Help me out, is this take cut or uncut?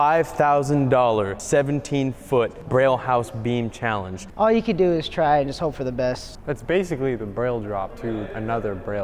cut